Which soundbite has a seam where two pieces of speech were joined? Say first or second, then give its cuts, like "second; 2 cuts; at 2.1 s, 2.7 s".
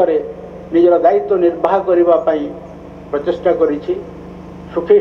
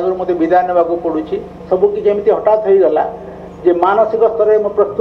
second; 1 cut; at 1.5 s